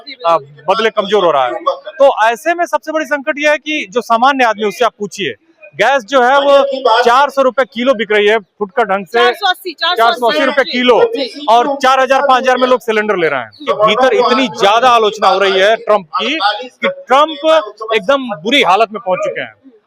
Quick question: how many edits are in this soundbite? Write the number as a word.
one